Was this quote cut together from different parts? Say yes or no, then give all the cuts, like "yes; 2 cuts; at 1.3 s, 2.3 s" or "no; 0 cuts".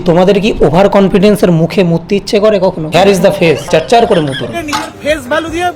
yes; 2 cuts; at 2.8 s, 4.5 s